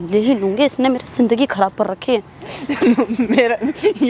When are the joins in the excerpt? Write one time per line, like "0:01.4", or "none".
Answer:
none